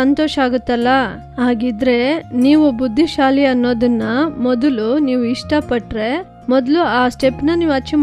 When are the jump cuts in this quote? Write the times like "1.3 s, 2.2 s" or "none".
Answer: 6.3 s